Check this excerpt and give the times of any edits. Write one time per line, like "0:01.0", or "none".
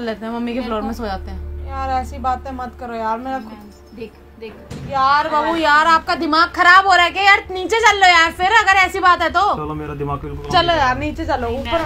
0:01.4
0:04.7